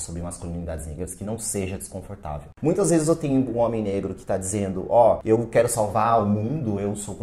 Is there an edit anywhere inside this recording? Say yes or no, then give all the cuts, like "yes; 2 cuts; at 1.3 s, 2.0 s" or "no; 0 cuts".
yes; 1 cut; at 2.5 s